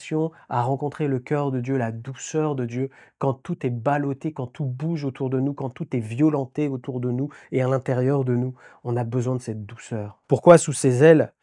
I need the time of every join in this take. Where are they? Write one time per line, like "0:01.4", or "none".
0:10.1